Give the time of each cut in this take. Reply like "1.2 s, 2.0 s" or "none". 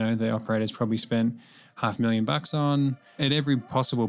3.2 s

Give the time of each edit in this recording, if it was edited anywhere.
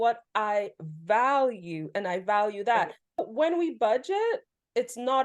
3.2 s

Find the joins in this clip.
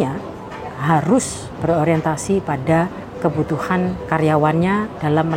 3.0 s, 4.0 s

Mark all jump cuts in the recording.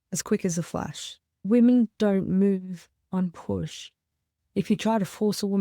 1.5 s

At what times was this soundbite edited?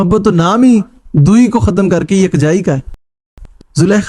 3.0 s

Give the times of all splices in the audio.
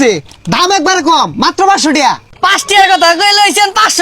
2.3 s

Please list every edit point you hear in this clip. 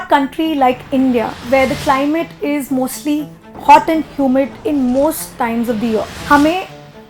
1.4 s, 4.6 s, 6.1 s

